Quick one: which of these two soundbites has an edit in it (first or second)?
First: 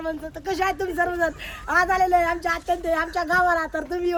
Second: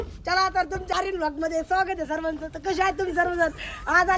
second